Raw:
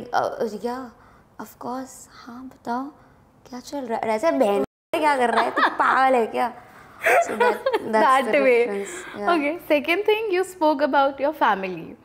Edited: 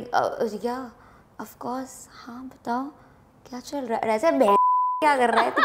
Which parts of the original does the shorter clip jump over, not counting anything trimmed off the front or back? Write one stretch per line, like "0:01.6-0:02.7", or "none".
none